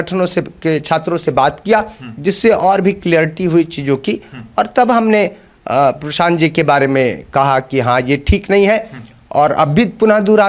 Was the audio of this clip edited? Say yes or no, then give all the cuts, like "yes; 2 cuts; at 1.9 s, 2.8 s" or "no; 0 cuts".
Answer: no; 0 cuts